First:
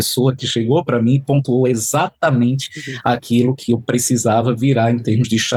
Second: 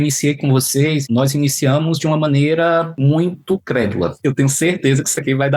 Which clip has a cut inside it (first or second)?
second